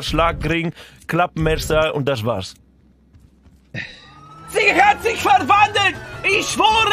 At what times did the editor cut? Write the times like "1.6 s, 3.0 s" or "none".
4.5 s